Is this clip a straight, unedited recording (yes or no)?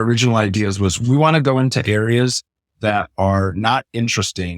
no